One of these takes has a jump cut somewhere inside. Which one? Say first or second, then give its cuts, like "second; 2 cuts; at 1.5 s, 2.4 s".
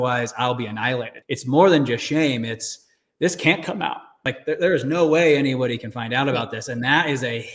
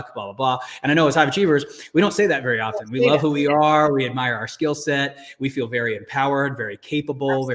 first; 2 cuts; at 1.1 s, 4.2 s